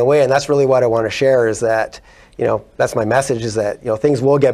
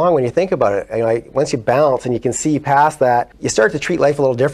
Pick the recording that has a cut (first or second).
second